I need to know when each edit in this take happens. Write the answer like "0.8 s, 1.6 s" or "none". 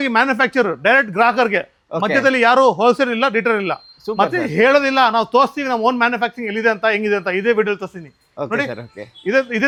none